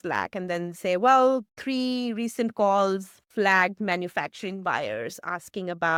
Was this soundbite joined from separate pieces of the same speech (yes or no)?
no